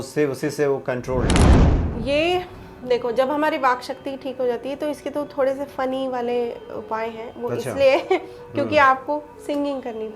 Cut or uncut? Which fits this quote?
cut